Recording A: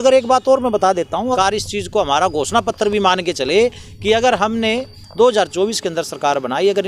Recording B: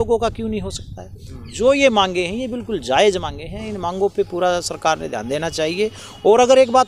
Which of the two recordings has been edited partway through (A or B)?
A